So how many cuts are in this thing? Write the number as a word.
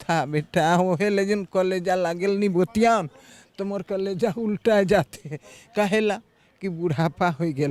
zero